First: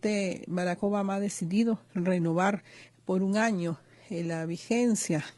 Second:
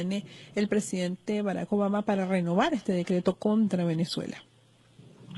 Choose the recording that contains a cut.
second; 1 cut; at 3.6 s

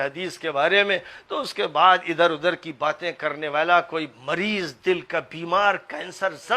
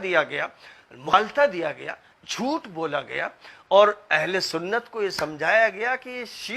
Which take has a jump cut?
second; 1 cut; at 1.1 s

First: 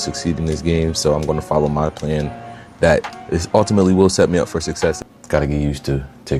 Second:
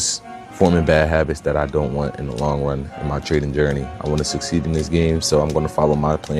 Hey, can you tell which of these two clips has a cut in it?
first; 1 cut; at 5.1 s

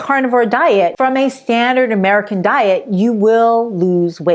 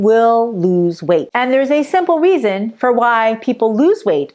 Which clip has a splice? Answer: first; 1 cut; at 0.9 s

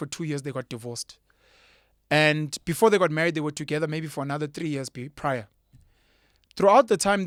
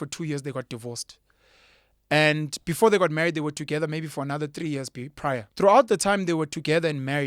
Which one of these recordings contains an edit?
second; 1 cut; at 5.5 s

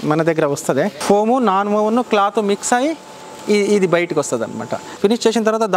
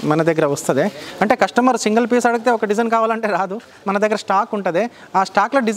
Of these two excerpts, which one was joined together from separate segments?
first; 2 cuts; at 1.0 s, 4.9 s

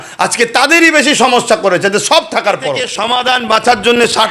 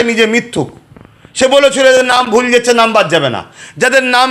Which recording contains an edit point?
first; 1 cut; at 2.9 s

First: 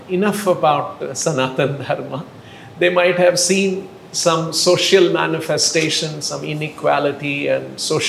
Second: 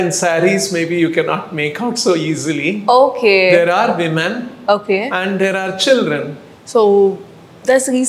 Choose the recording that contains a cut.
second; 1 cut; at 6.4 s

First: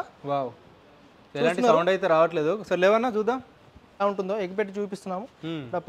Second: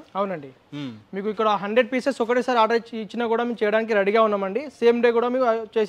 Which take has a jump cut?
first; 1 cut; at 4.0 s

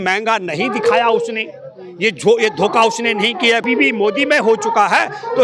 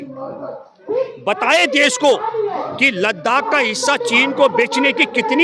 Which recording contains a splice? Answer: first; 1 cut; at 3.6 s

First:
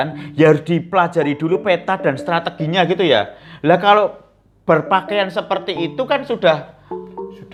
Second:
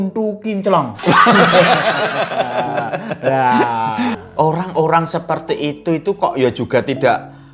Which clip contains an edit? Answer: second; 1 cut; at 4.2 s

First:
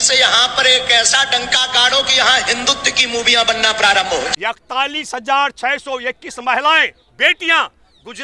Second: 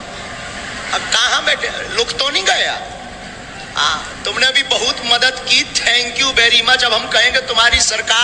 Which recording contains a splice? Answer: first; 1 cut; at 4.3 s

